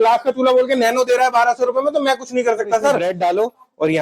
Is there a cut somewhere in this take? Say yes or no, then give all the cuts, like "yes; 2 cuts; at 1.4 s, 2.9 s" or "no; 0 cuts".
yes; 1 cut; at 3.0 s